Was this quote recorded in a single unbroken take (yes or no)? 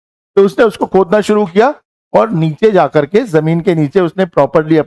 yes